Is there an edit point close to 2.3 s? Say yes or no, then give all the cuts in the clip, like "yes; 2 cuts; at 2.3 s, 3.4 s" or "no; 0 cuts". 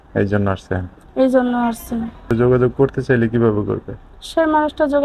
yes; 1 cut; at 2.3 s